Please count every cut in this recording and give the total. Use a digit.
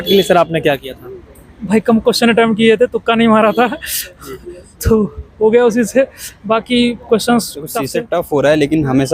1